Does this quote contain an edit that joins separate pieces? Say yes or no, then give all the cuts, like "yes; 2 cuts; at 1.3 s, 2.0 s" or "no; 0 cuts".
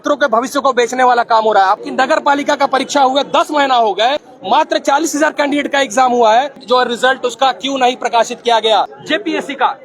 yes; 4 cuts; at 1.8 s, 4.3 s, 6.6 s, 9.0 s